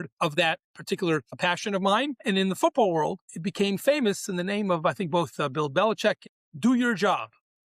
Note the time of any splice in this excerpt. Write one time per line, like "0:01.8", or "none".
0:06.3